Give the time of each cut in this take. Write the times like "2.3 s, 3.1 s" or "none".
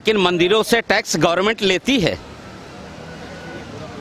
none